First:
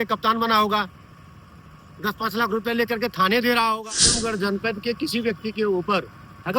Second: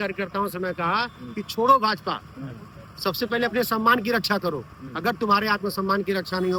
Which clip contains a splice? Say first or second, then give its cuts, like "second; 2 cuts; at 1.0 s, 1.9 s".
first; 1 cut; at 4.2 s